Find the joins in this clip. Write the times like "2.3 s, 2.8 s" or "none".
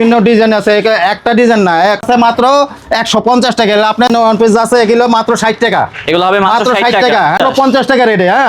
2.0 s, 4.1 s, 7.4 s